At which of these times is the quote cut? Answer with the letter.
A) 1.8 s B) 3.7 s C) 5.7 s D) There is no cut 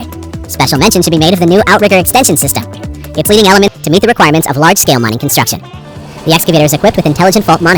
B